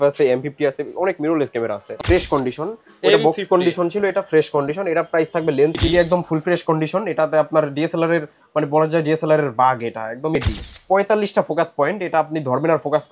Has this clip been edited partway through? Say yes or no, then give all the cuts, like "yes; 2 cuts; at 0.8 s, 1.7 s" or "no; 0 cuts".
yes; 3 cuts; at 2.0 s, 5.8 s, 10.4 s